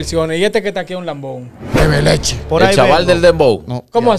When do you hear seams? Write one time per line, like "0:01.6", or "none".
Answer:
0:01.6